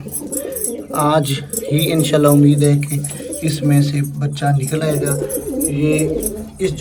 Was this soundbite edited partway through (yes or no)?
no